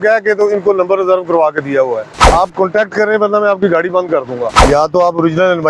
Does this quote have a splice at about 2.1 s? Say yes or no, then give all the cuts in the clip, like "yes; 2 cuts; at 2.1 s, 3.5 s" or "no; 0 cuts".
yes; 2 cuts; at 2.1 s, 4.6 s